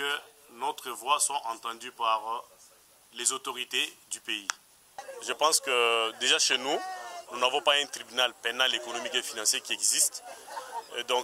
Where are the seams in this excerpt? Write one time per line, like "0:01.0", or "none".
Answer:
0:05.0